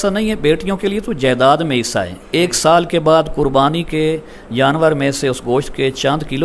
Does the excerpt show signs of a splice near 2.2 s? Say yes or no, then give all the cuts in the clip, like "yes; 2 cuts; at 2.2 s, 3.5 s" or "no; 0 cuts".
no; 0 cuts